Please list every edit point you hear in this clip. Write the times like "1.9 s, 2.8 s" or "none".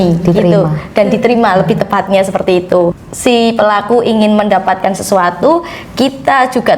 3.1 s